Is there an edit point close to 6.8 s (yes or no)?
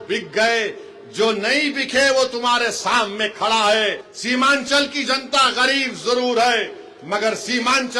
no